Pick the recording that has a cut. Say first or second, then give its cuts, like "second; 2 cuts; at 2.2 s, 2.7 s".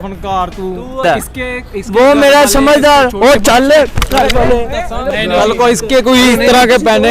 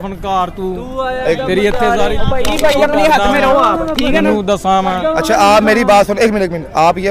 first; 2 cuts; at 1.0 s, 5.1 s